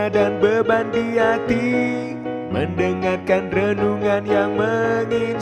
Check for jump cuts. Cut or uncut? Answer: uncut